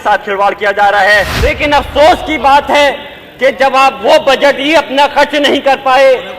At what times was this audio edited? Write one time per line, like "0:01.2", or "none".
0:01.4